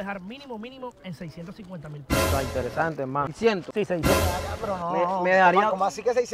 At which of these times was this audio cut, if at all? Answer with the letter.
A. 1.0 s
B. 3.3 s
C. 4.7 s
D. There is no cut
B